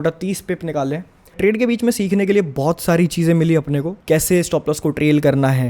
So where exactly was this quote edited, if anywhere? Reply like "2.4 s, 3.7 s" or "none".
1.4 s, 3.9 s